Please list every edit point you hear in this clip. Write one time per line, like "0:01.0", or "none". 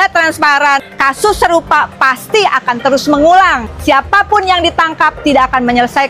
0:00.9
0:03.7